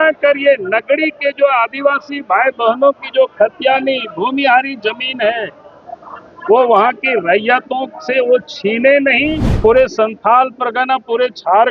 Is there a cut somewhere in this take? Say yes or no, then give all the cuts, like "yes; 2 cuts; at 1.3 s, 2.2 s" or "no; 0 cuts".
yes; 1 cut; at 9.5 s